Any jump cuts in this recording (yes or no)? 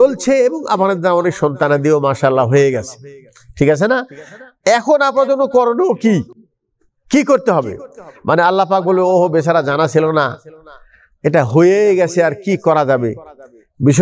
no